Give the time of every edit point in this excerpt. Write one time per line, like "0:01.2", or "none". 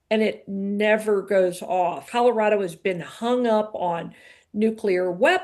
0:02.1